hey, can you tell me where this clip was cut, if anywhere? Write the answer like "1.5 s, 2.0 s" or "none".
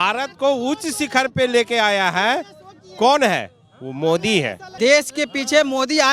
4.6 s